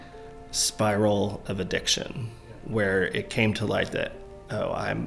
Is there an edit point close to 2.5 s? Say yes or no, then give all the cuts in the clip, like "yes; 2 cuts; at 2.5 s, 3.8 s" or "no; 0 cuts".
yes; 1 cut; at 2.5 s